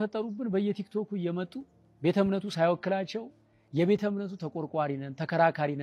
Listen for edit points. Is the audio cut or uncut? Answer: uncut